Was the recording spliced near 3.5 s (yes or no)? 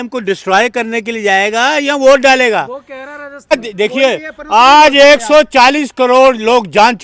yes